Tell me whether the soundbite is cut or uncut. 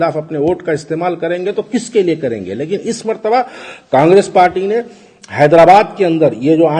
uncut